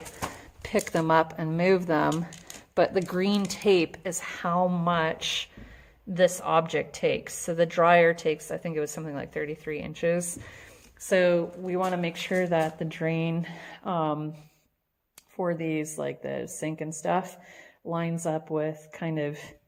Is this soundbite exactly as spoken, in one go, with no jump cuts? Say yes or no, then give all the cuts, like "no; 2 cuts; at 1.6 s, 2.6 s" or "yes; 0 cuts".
yes; 0 cuts